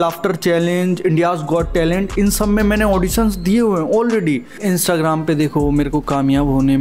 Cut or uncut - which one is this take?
cut